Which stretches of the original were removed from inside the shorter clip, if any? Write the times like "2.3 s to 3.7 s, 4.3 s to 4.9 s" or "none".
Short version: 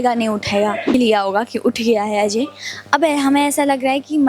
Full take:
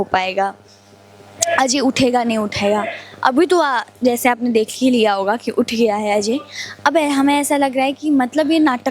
3.0 s to 4.9 s

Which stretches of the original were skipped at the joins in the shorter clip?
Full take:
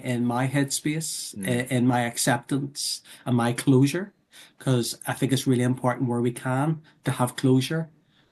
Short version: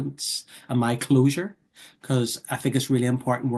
none

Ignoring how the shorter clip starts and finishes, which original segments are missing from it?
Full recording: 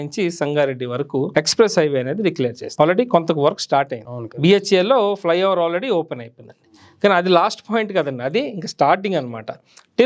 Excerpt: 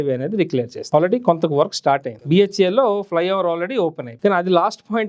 4.0 s to 4.3 s, 6.2 s to 6.8 s

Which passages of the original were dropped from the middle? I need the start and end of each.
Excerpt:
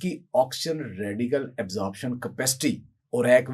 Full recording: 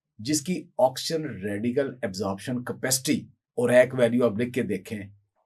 none

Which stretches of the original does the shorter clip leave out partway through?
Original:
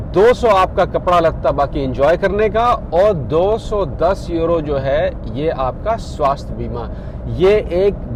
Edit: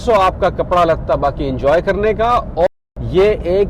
3.0 s to 6.9 s

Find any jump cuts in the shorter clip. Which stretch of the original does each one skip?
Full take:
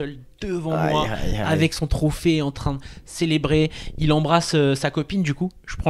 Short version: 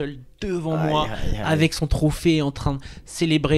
none

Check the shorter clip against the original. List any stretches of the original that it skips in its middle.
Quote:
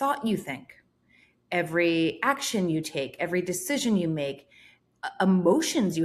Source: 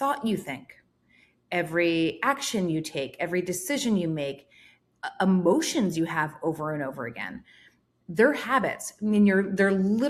none

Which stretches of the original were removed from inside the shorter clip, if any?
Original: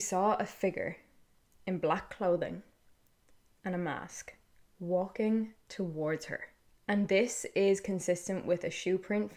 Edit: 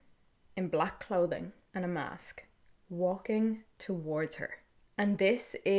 2.7 s to 3.5 s

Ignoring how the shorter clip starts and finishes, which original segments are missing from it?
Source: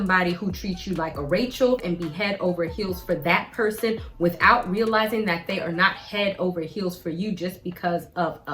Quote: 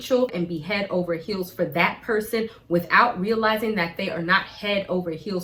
none

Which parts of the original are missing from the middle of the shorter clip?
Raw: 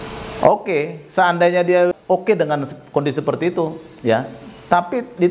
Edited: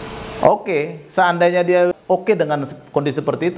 none

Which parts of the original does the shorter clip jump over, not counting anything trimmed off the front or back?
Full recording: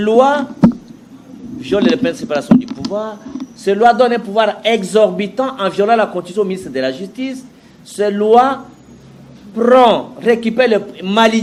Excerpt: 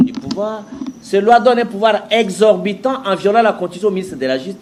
none

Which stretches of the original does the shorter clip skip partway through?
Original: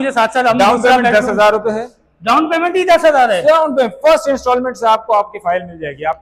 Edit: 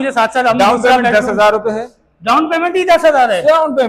none

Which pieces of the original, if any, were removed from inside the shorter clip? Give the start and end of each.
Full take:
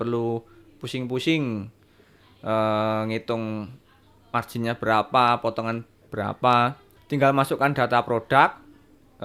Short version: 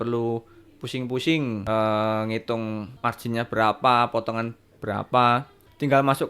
1.6 s to 2.4 s, 3.7 s to 4.2 s

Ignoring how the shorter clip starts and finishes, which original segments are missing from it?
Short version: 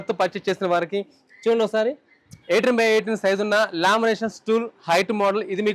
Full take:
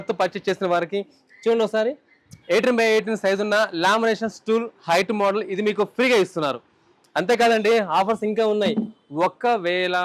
none

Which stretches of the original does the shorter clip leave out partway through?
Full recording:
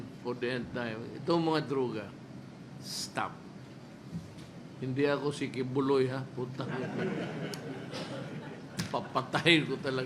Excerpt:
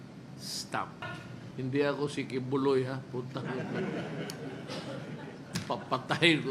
3.5 s to 4.3 s

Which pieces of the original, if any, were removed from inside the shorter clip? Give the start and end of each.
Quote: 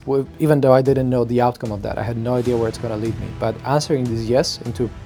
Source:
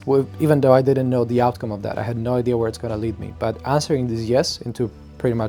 none

